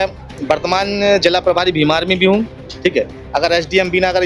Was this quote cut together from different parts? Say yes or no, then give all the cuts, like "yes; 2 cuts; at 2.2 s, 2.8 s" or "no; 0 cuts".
no; 0 cuts